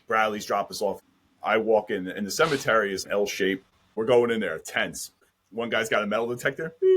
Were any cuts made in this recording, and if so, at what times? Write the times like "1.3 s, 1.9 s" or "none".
1.1 s, 3.7 s